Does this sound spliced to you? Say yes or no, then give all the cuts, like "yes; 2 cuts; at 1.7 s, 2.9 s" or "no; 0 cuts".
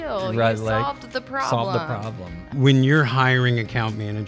yes; 1 cut; at 2.5 s